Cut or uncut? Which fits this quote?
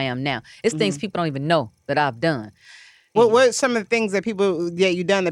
cut